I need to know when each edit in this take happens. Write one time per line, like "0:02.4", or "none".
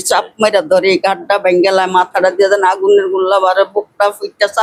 none